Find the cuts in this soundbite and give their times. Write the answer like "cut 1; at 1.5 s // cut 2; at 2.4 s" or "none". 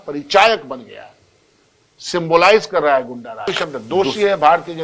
cut 1; at 3.5 s